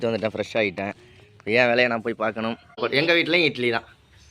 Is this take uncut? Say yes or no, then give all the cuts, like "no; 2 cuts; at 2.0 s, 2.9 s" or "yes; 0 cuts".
no; 1 cut; at 2.8 s